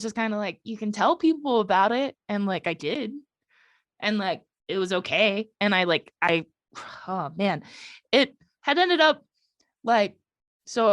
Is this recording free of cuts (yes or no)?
yes